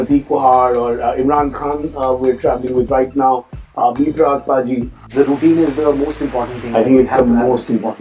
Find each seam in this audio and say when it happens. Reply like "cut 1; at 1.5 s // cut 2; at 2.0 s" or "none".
cut 1; at 5.1 s